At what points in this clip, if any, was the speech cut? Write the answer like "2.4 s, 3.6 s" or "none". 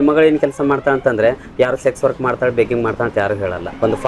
none